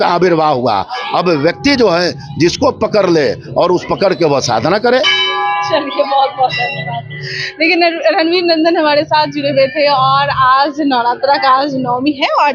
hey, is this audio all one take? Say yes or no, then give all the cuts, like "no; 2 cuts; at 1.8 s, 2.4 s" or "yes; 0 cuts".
yes; 0 cuts